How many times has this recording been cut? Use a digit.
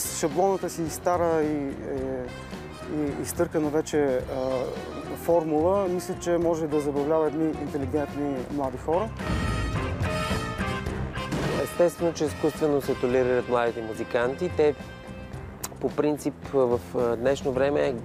1